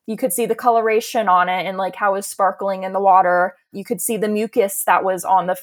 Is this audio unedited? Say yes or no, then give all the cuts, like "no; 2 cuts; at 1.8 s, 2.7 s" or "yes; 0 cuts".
no; 1 cut; at 3.7 s